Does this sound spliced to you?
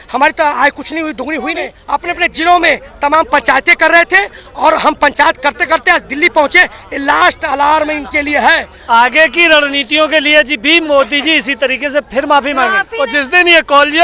yes; 3 cuts; at 1.8 s, 8.7 s, 12.9 s

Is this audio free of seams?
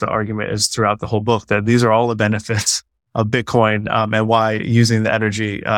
yes; 0 cuts

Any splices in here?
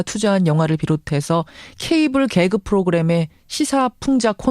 yes; 1 cut; at 3.0 s

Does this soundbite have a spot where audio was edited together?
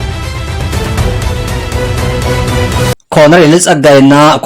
yes; 1 cut; at 2.9 s

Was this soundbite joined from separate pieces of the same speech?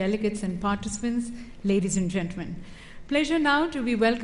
yes; 1 cut; at 2.3 s

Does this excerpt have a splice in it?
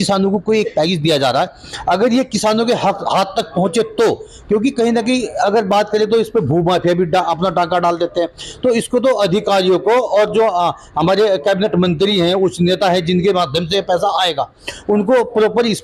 no; 0 cuts

